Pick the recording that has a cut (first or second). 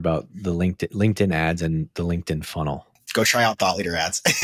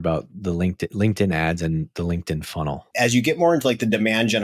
second